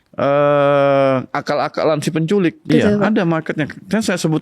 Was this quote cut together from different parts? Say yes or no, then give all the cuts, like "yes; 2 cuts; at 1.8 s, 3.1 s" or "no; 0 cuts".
yes; 1 cut; at 2.6 s